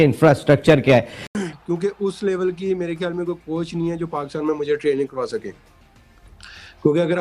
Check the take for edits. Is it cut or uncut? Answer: cut